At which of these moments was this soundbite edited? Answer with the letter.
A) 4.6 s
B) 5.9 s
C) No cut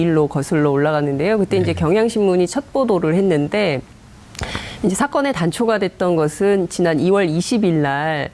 A